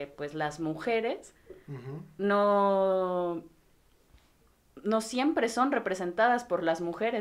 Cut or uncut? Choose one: uncut